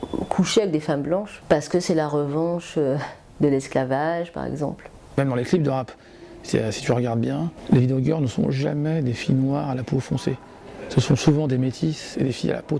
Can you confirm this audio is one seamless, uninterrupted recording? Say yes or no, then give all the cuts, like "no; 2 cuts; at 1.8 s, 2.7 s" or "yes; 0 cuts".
no; 3 cuts; at 1.3 s, 4.8 s, 7.5 s